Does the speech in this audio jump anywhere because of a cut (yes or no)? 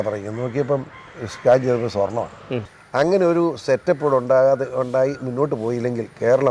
yes